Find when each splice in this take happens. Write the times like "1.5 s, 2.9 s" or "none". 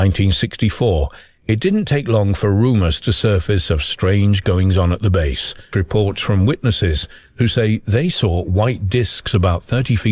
5.6 s